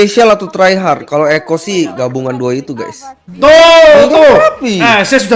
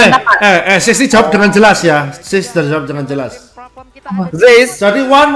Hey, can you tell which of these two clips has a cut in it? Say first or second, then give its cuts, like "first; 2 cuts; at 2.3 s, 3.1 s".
first; 1 cut; at 3.3 s